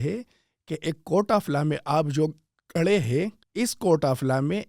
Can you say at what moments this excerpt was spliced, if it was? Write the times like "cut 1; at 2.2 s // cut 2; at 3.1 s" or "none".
cut 1; at 3.4 s